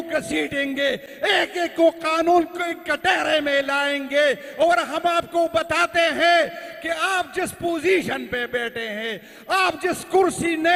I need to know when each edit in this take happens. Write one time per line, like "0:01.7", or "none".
none